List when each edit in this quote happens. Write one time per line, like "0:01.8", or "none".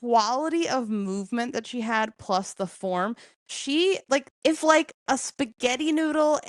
0:04.3